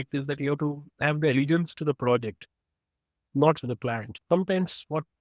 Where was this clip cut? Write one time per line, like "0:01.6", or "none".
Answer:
0:03.6